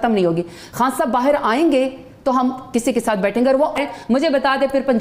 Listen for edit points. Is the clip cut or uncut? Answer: cut